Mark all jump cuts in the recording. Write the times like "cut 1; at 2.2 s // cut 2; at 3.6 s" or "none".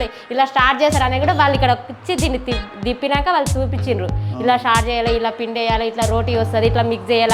none